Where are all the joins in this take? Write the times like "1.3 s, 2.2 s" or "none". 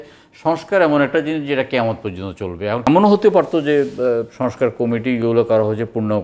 2.9 s